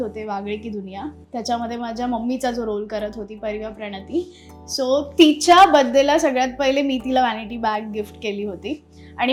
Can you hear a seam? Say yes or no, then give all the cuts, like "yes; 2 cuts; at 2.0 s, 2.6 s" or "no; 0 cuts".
no; 0 cuts